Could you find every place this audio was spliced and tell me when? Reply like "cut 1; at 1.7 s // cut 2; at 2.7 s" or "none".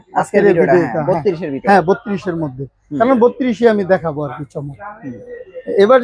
none